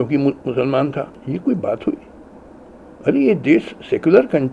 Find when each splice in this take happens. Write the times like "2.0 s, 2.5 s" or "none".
1.2 s